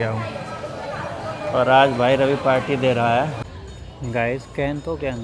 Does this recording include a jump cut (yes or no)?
yes